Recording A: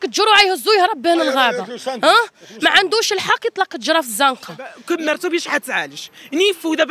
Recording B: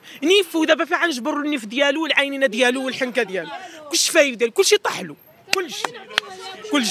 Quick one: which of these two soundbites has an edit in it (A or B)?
A